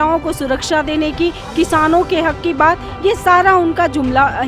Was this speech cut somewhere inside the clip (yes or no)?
no